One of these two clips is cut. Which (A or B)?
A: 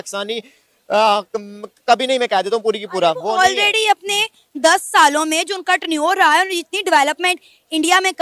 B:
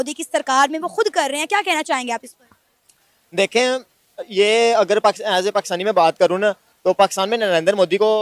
B